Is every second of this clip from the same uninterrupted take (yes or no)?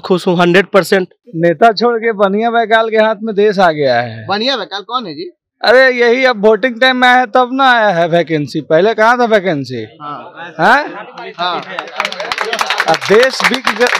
no